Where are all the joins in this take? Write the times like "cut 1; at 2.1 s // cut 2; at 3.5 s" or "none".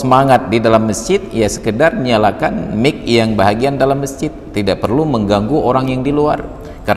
none